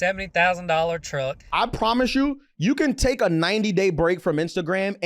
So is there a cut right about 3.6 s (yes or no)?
no